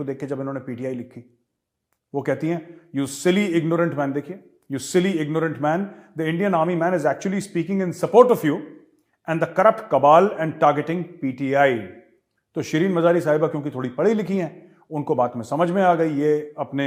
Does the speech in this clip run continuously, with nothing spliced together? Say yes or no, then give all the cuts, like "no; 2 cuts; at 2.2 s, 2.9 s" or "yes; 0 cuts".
yes; 0 cuts